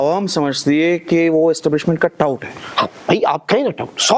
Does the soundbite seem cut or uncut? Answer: uncut